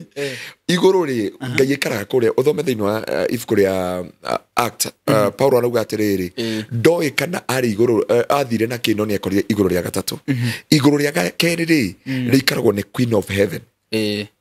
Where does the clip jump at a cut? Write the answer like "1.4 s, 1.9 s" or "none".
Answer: none